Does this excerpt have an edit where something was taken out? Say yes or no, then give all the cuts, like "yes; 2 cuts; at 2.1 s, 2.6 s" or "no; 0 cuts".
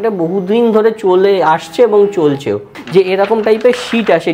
yes; 1 cut; at 2.8 s